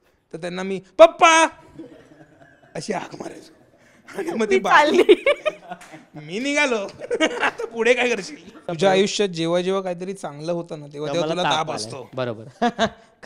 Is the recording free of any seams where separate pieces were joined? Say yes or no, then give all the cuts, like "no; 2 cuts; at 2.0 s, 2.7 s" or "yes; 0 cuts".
no; 1 cut; at 8.6 s